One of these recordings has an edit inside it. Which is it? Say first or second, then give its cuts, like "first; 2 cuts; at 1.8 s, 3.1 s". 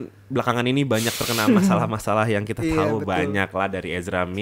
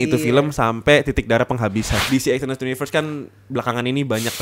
second; 1 cut; at 2.0 s